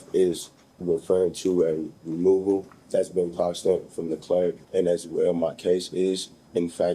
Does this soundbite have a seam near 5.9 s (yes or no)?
no